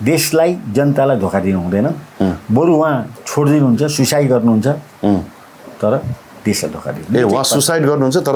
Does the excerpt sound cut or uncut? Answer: uncut